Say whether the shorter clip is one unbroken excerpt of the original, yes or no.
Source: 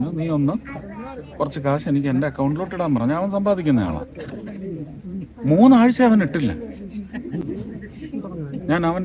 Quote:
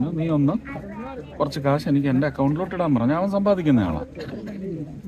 yes